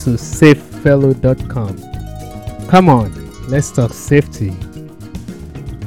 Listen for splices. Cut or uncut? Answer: cut